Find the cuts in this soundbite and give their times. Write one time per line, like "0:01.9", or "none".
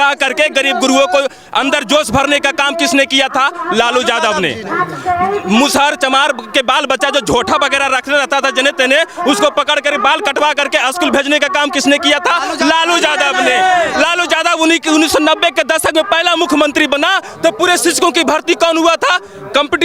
none